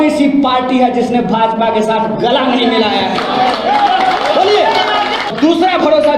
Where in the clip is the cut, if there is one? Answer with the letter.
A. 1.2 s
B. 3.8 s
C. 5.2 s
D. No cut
C